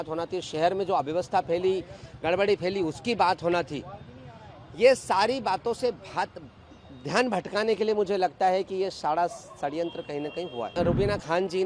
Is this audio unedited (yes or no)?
no